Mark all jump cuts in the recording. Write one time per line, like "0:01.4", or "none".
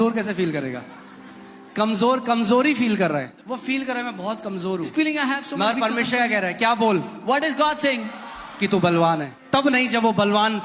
0:03.3
0:09.3

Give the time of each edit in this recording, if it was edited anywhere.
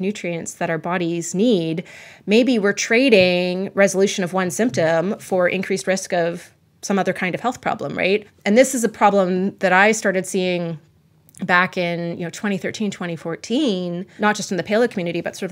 0:08.3
0:14.1

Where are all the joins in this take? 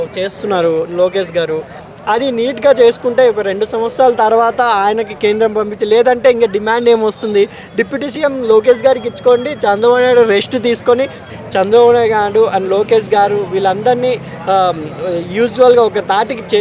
0:11.2

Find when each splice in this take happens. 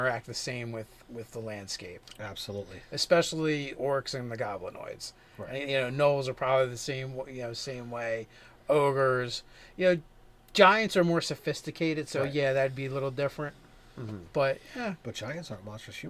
none

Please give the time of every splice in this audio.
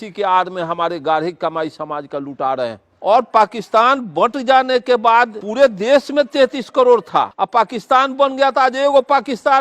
0:02.9
0:05.4
0:07.4

